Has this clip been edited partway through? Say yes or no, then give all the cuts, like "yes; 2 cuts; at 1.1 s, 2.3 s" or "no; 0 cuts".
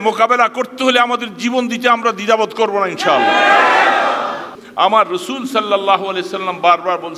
yes; 1 cut; at 4.6 s